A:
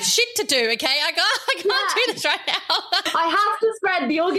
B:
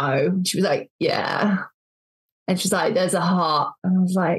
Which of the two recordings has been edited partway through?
A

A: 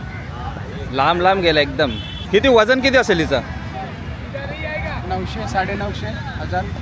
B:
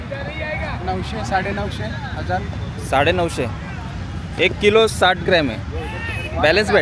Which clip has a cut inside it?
A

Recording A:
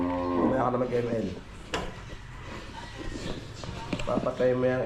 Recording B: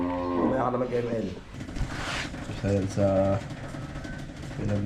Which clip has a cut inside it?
B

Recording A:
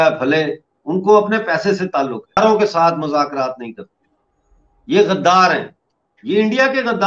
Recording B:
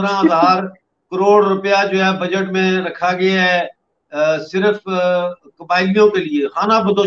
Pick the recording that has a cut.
A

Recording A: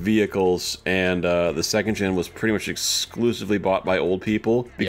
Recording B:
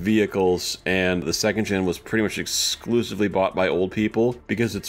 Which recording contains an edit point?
B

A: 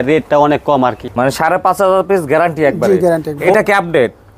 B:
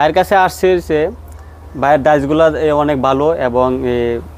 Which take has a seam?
A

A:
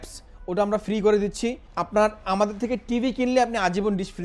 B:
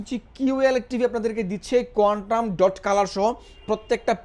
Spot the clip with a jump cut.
A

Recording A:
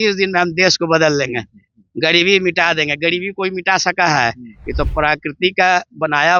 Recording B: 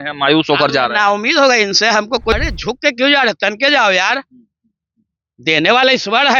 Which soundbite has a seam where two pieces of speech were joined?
B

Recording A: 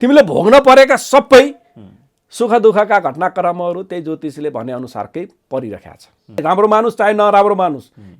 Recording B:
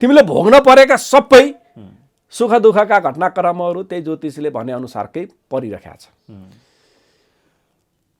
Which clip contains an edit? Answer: A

